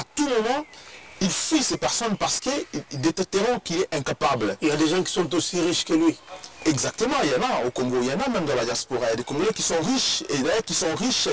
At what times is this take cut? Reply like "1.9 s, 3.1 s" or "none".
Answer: none